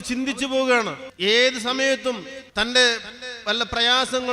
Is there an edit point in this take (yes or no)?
yes